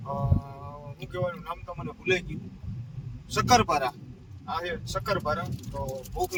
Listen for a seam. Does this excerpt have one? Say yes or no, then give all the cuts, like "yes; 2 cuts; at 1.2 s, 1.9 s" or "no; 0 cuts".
no; 0 cuts